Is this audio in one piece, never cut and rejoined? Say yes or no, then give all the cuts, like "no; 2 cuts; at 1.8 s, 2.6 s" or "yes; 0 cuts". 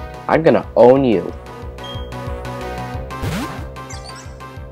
yes; 0 cuts